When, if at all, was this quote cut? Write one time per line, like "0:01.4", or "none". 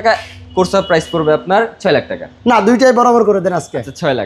none